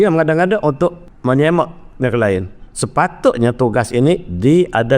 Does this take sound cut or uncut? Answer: cut